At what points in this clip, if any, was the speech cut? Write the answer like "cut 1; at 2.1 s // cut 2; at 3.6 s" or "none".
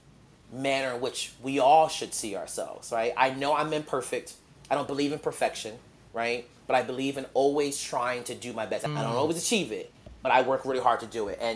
cut 1; at 8.9 s